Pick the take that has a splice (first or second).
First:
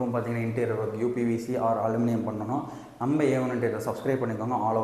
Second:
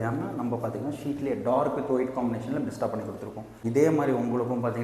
second